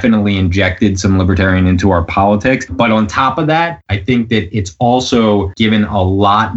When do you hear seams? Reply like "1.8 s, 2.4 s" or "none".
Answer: 2.7 s, 3.9 s, 5.5 s